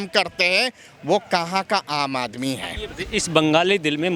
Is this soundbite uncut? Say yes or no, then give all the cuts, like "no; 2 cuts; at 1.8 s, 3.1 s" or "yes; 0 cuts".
yes; 0 cuts